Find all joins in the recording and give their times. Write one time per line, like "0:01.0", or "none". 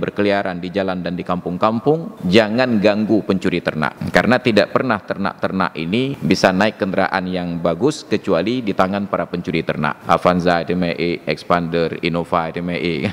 0:02.1
0:03.9
0:06.1
0:10.0